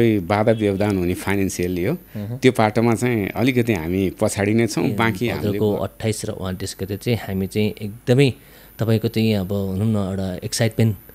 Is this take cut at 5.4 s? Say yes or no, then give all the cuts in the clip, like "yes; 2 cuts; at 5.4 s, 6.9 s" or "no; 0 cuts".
yes; 1 cut; at 5.4 s